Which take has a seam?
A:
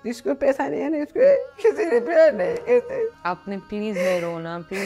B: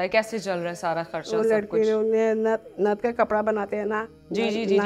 A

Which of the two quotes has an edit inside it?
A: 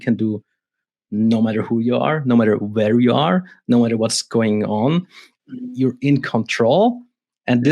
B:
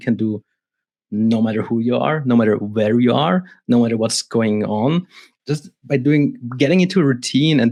A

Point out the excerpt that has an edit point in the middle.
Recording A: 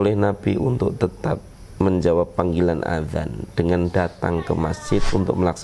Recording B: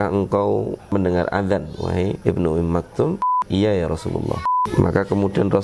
B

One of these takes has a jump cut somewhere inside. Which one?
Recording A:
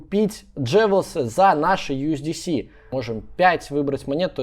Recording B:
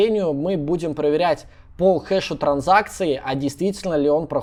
A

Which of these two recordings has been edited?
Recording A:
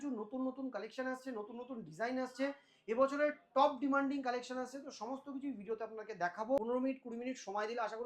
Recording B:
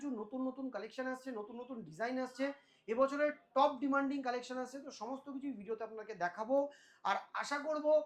A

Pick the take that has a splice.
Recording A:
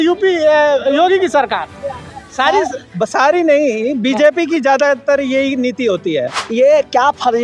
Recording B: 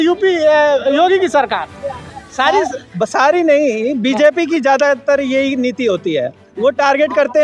A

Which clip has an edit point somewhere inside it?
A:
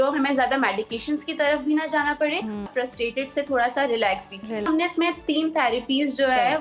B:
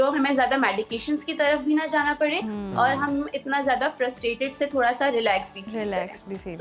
A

